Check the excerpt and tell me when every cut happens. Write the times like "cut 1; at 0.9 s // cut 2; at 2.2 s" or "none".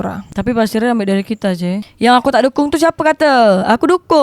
cut 1; at 1.8 s